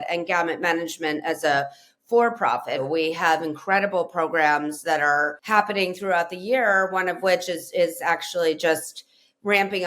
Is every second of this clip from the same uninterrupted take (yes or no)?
no